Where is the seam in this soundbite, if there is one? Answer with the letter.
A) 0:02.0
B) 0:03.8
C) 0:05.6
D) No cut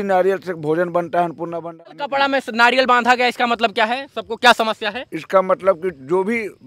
A